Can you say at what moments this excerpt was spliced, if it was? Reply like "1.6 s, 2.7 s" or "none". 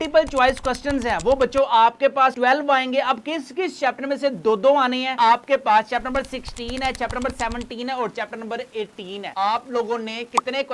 5.1 s

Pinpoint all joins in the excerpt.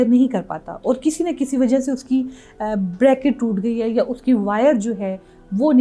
none

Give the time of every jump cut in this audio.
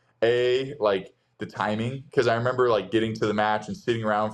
none

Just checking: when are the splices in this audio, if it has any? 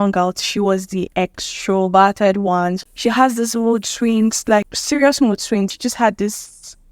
1.1 s, 2.9 s, 4.8 s, 5.7 s

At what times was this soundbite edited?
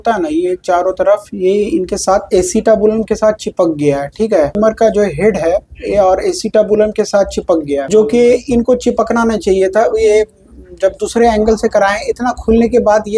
4.5 s, 7.8 s

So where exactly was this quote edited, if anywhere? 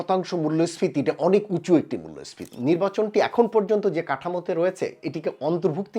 2.5 s

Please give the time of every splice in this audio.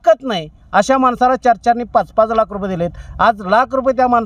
none

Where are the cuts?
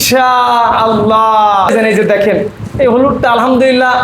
1.7 s

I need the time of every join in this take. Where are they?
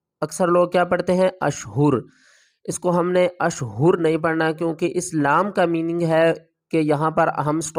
none

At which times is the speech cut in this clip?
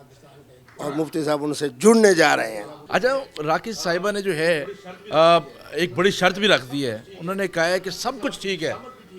2.8 s

